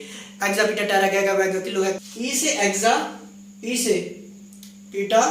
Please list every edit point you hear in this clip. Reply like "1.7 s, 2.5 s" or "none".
2.0 s